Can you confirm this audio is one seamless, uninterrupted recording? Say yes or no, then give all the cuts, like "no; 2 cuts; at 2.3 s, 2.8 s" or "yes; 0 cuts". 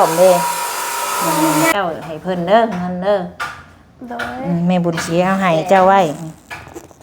no; 1 cut; at 1.7 s